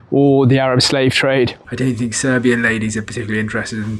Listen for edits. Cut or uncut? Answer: cut